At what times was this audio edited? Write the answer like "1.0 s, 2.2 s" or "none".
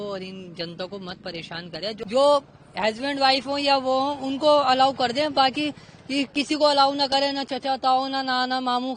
2.0 s